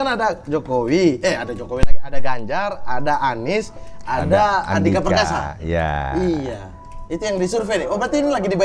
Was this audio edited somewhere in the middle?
no; 0 cuts

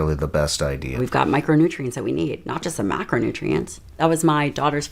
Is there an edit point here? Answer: yes; 2 cuts; at 1.0 s, 3.9 s

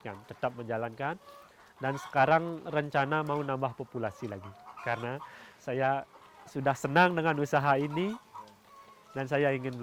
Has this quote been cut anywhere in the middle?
no; 0 cuts

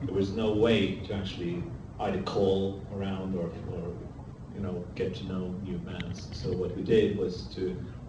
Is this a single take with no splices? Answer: no; 1 cut; at 2.6 s

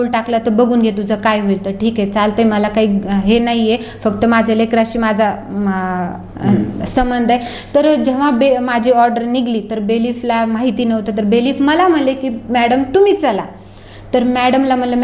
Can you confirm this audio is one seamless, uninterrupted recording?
yes; 0 cuts

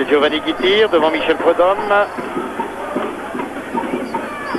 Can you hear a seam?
no; 0 cuts

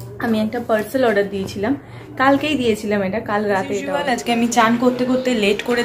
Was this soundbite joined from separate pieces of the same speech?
yes; 1 cut; at 4.0 s

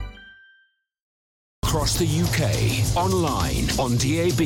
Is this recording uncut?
no; 1 cut; at 1.6 s

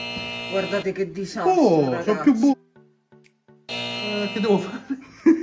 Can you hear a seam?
yes; 1 cut; at 4.1 s

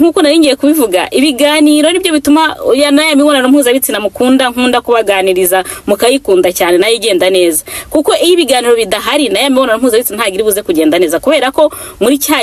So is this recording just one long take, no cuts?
yes; 0 cuts

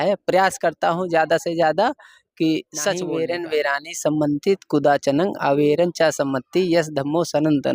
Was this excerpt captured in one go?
no; 1 cut; at 3.1 s

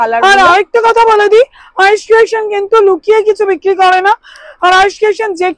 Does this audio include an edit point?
no; 0 cuts

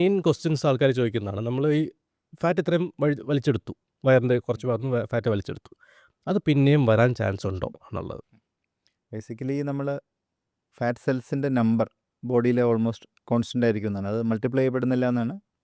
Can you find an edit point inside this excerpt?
no; 0 cuts

